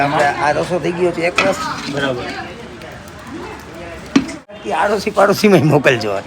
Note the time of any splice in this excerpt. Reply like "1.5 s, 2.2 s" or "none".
4.6 s